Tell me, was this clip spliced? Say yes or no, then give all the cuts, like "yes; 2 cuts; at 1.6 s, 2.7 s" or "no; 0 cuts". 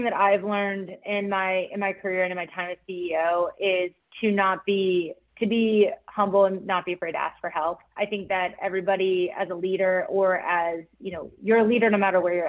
no; 0 cuts